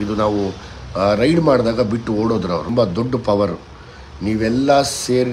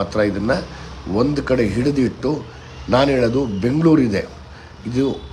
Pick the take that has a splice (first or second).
first